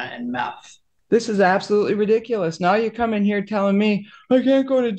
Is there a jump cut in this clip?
yes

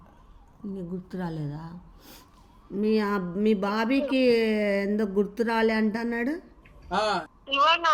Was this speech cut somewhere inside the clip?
no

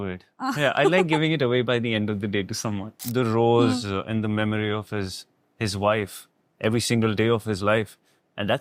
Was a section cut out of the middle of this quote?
yes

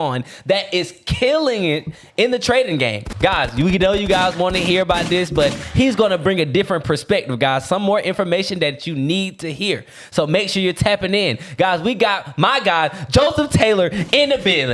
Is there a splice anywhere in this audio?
no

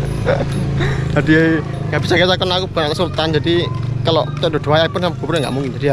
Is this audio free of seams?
yes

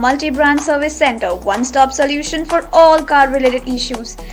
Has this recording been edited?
no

